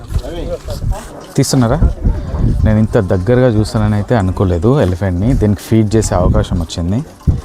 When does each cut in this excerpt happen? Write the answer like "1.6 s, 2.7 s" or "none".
none